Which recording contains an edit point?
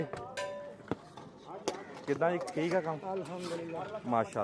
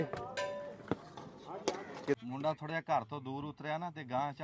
second; 1 cut; at 2.2 s

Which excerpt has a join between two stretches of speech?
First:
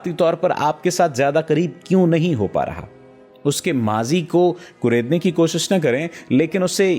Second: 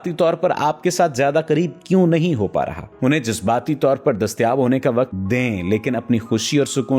second; 2 cuts; at 2.8 s, 5.2 s

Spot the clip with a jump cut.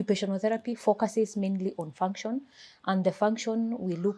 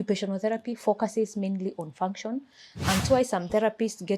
second; 1 cut; at 3.0 s

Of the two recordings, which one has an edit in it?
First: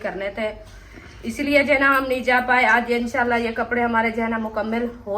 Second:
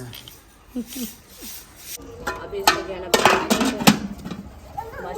second; 1 cut; at 2.1 s

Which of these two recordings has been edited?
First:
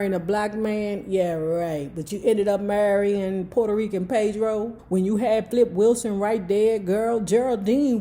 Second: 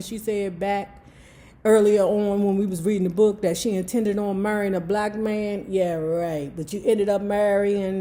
first; 1 cut; at 4.8 s

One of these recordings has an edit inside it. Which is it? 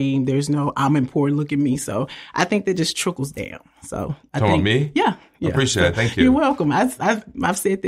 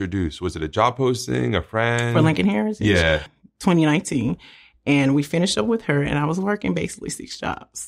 second; 1 cut; at 3.3 s

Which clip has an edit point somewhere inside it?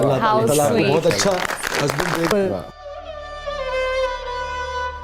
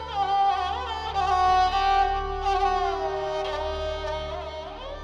first; 1 cut; at 2.3 s

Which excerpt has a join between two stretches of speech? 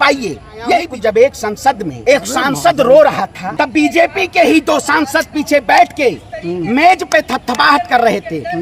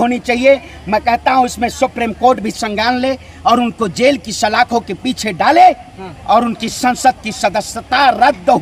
first; 3 cuts; at 0.9 s, 1.9 s, 3.4 s

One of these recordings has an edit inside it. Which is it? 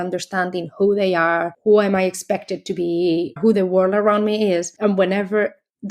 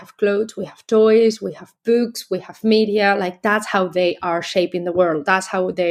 first; 3 cuts; at 1.5 s, 3.4 s, 4.7 s

